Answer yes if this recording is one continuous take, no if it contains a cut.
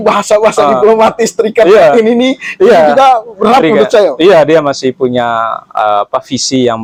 yes